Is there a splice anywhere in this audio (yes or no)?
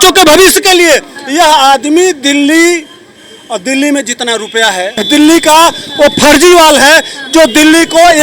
yes